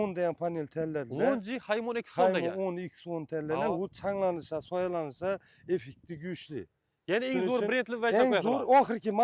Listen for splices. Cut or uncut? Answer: uncut